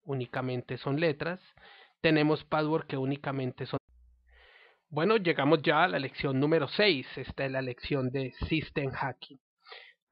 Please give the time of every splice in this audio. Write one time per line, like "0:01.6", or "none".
none